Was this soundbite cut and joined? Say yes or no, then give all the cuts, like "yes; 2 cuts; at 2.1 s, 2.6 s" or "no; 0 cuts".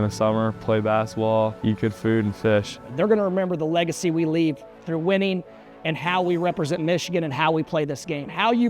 yes; 2 cuts; at 1.6 s, 2.8 s